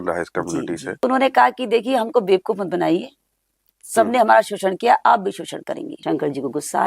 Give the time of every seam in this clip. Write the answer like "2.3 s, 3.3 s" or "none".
1.0 s, 5.9 s